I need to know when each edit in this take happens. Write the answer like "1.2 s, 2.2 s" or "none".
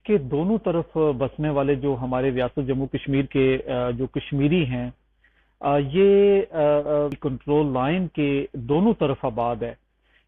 7.2 s